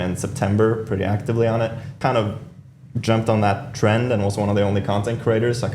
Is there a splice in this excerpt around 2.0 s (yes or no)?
yes